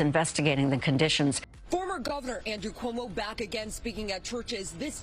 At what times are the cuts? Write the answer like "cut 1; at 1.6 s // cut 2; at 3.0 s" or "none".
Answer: cut 1; at 1.4 s